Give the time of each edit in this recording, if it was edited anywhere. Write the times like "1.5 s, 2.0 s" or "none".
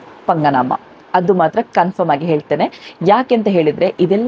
none

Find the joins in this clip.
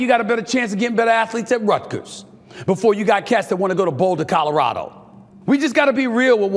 none

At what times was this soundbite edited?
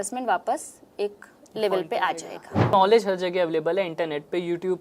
2.7 s

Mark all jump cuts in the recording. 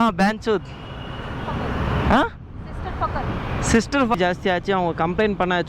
4.1 s

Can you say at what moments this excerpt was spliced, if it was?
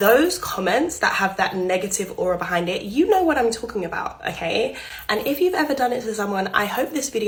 none

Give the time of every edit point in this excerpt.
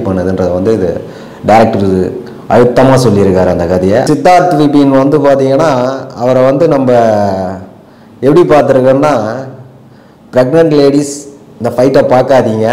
4.1 s

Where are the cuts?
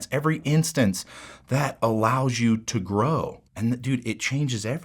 3.4 s

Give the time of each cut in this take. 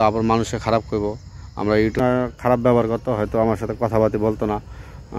2.0 s

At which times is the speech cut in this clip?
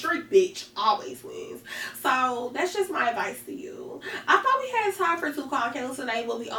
none

